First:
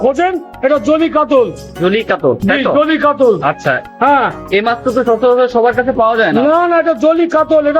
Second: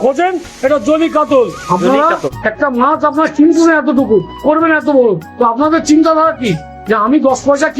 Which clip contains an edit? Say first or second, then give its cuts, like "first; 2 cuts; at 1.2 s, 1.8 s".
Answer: second; 1 cut; at 1.7 s